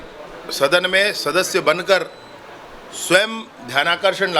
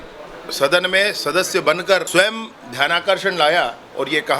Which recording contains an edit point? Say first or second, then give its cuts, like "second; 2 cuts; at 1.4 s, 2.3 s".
second; 1 cut; at 2.1 s